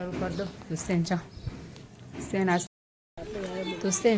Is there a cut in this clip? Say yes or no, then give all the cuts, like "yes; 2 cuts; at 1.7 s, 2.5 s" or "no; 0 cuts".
yes; 1 cut; at 2.7 s